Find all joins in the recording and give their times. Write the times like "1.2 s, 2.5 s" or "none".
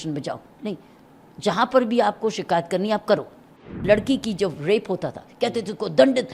3.6 s